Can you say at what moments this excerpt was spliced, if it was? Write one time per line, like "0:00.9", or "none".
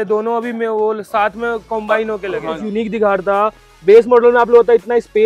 0:02.5